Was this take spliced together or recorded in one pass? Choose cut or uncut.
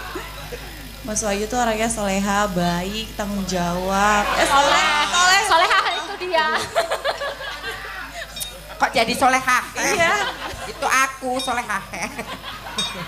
uncut